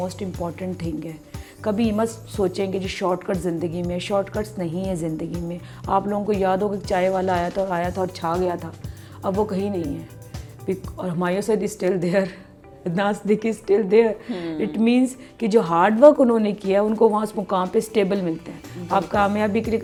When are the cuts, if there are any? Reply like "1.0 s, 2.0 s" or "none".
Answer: none